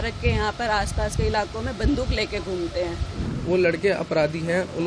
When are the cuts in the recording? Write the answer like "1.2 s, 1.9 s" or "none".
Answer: 3.3 s